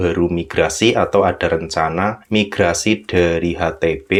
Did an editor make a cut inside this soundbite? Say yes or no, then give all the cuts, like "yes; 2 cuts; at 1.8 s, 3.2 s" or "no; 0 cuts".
no; 0 cuts